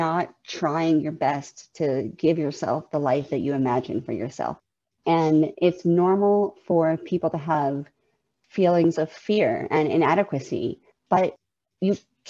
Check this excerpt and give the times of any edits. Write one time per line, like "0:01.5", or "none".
0:04.6
0:10.9